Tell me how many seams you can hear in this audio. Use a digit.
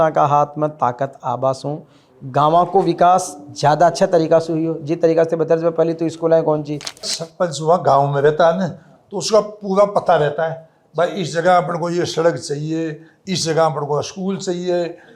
1